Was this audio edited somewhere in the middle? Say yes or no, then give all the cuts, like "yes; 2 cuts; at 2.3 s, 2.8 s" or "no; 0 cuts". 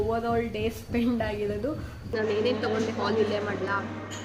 yes; 1 cut; at 2.1 s